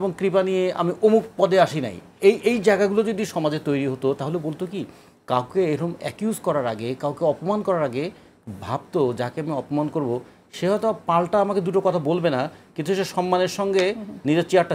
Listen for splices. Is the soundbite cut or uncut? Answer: uncut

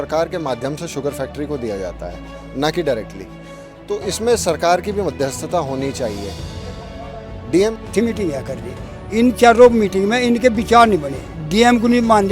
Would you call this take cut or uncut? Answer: cut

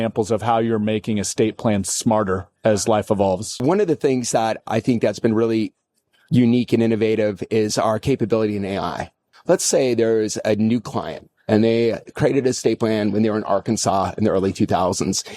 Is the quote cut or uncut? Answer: cut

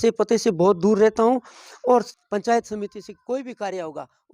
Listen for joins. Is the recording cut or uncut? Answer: cut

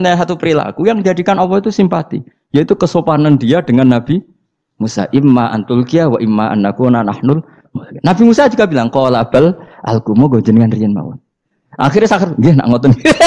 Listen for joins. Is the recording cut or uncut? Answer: uncut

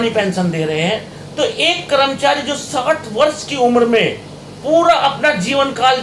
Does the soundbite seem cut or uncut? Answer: uncut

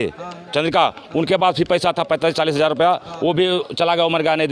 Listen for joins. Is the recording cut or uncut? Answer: uncut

